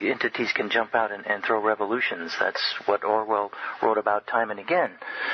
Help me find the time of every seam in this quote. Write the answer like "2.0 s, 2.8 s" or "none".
3.2 s

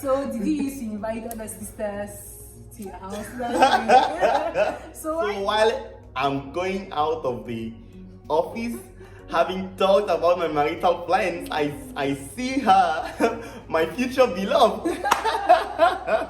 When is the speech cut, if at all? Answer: 5.3 s

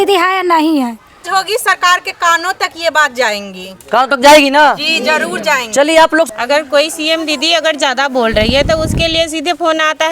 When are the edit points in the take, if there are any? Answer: 1.2 s, 6.3 s

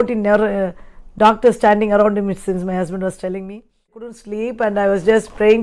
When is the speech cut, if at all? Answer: 4.1 s

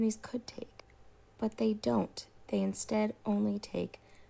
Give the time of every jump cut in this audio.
none

